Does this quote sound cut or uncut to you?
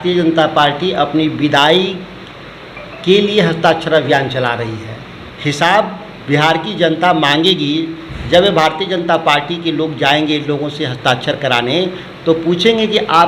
cut